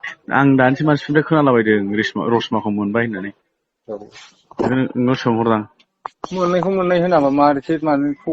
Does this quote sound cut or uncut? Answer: uncut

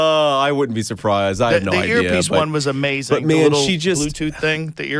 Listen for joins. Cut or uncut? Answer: uncut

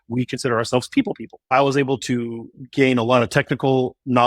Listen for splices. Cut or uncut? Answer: cut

